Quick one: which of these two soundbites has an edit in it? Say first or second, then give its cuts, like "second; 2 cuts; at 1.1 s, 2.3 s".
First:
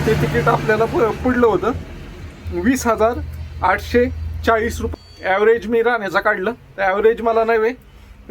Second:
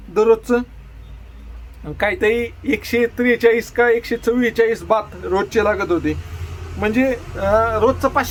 first; 1 cut; at 4.9 s